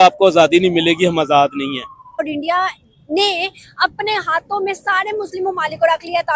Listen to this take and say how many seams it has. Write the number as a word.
one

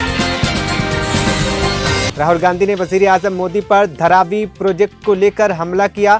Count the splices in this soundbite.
one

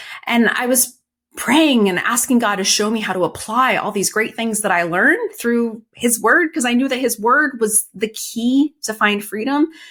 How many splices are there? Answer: zero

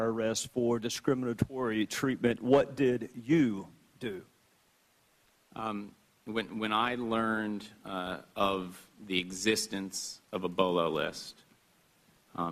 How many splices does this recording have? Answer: zero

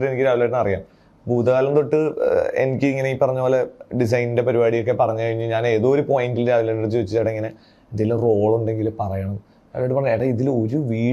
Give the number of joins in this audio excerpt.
zero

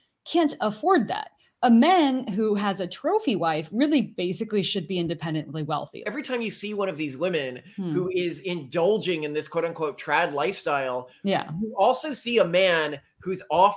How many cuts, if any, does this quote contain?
one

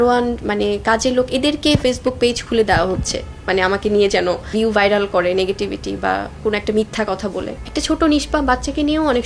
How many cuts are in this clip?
two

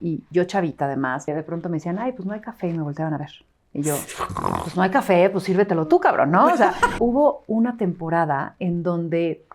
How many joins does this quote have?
two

